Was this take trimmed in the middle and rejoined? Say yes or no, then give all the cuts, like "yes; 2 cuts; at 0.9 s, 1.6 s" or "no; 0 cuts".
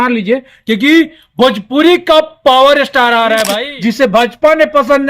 yes; 1 cut; at 3.6 s